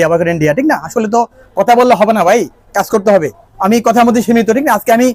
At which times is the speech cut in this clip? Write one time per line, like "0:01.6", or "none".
none